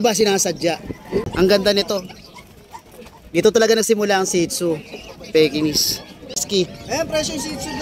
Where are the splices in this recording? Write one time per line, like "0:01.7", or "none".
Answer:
0:01.3
0:06.4